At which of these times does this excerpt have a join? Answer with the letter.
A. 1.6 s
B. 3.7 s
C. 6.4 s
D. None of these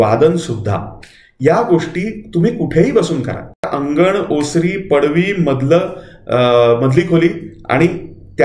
B